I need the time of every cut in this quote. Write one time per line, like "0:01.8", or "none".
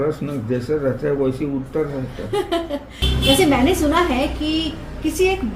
0:02.9